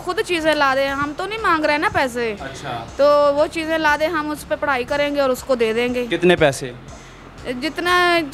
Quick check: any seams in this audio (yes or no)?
no